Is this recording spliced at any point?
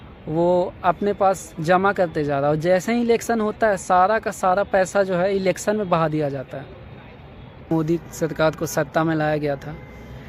yes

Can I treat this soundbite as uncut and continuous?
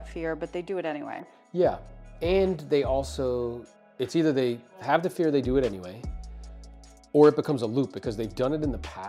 yes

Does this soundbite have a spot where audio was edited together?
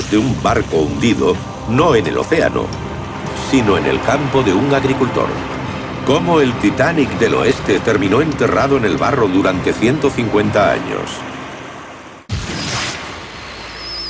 yes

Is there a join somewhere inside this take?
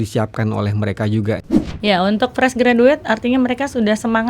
yes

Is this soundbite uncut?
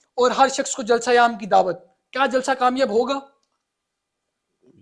yes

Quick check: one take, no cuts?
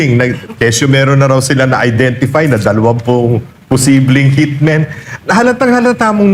yes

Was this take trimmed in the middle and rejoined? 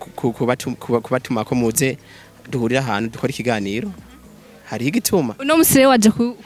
yes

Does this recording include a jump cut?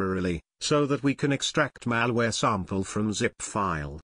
no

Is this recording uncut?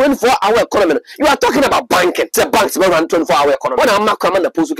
no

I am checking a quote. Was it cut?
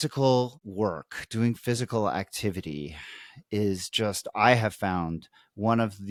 no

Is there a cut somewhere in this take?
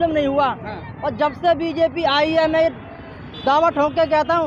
no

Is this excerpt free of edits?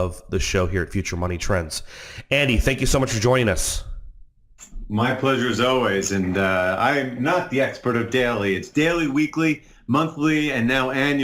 yes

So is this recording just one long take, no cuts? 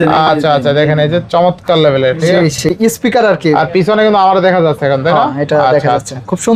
no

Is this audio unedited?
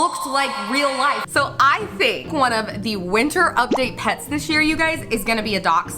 no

